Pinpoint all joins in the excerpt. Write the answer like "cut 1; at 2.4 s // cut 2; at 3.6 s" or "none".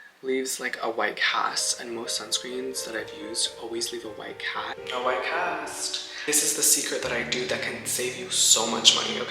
cut 1; at 4.8 s